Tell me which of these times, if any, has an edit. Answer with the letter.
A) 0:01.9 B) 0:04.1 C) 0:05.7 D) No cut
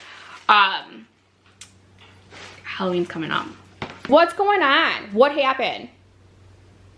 B